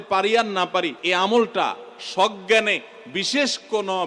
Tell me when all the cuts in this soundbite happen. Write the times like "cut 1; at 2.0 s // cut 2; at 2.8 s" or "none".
cut 1; at 1.0 s